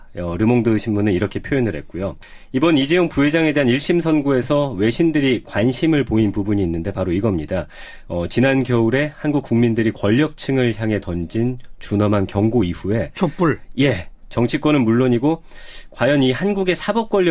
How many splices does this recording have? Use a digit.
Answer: 1